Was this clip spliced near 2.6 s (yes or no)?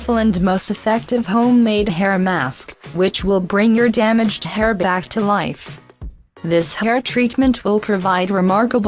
yes